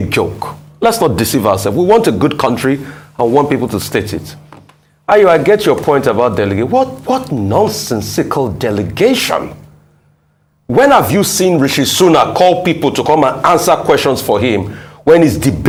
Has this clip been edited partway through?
no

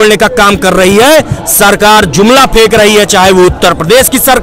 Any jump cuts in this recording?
no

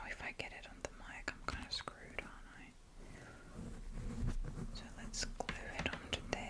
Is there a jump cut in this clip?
no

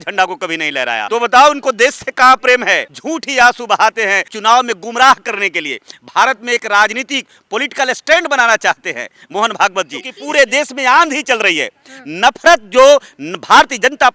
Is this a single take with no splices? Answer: no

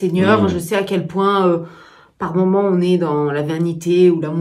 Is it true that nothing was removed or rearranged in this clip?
yes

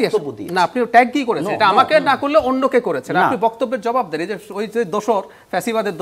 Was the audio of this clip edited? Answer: no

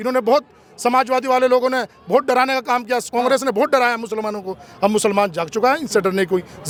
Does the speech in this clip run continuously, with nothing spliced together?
yes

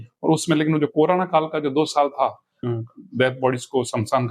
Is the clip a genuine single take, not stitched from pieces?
no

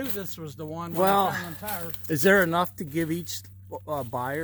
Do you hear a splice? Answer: no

